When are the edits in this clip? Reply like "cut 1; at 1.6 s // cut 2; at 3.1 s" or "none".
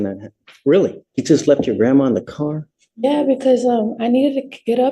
cut 1; at 1.1 s